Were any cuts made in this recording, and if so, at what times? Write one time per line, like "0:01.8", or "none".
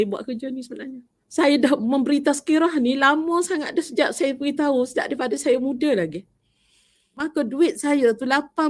0:01.1
0:07.2